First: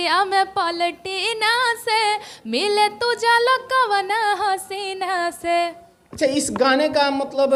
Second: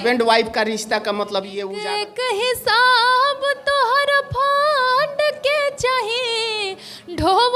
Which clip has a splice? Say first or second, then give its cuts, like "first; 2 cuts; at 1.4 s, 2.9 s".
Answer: second; 1 cut; at 1.7 s